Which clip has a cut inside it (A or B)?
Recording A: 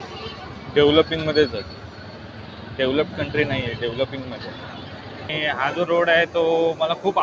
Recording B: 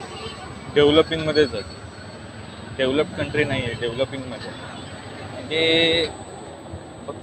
A